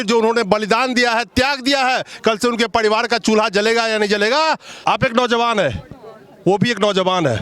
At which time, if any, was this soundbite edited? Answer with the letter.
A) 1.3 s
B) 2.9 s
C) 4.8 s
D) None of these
D